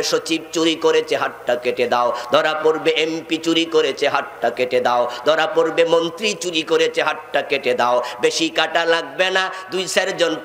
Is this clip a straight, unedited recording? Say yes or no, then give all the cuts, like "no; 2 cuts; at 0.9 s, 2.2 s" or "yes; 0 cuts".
yes; 0 cuts